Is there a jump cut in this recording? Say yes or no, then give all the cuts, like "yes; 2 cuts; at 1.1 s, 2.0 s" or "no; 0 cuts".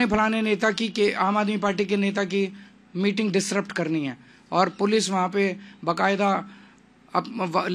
no; 0 cuts